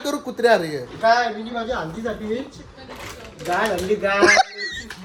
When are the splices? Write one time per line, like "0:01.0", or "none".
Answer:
none